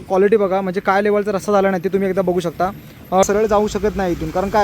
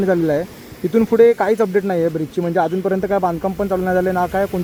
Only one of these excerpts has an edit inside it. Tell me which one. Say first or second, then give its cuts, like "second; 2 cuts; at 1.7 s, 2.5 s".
first; 1 cut; at 3.2 s